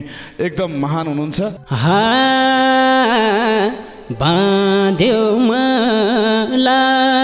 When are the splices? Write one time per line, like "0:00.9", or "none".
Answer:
0:01.6